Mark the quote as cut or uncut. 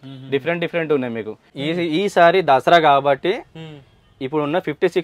cut